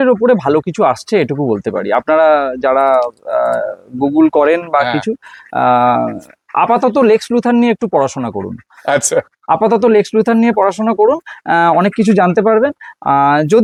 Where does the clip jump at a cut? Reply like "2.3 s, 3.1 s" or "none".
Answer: none